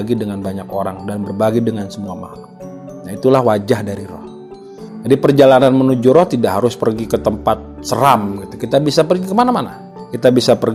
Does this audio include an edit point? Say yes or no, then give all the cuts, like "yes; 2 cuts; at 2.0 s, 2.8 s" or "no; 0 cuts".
no; 0 cuts